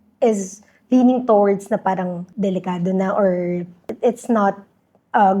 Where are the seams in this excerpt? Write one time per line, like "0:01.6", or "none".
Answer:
0:02.2
0:03.9